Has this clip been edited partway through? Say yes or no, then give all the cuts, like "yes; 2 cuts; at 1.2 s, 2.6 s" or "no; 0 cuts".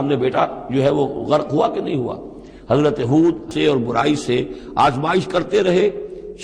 yes; 1 cut; at 3.5 s